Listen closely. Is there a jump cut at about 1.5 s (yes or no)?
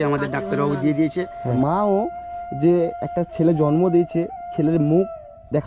yes